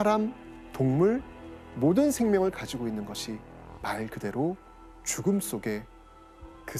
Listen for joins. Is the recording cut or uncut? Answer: uncut